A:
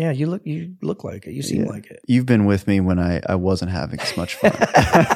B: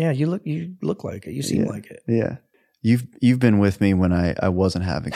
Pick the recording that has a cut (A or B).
A